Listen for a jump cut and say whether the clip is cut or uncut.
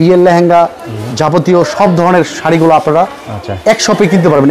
uncut